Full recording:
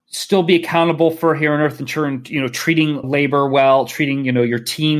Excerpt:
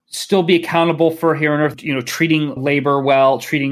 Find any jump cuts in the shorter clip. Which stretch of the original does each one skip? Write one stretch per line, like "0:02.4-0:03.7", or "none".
0:01.8-0:02.3